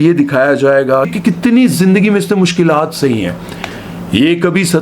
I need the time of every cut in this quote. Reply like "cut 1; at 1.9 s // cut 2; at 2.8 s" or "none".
cut 1; at 1.1 s